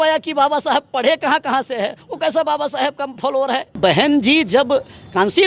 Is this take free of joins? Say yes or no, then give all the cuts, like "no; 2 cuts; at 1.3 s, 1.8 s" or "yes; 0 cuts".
no; 1 cut; at 3.8 s